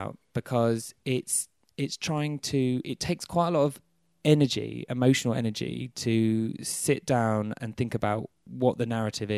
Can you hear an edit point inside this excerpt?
yes; 1 cut; at 8.4 s

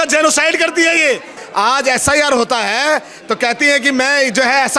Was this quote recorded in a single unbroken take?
no; 1 cut; at 1.4 s

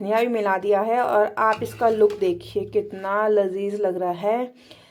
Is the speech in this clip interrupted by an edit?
no; 0 cuts

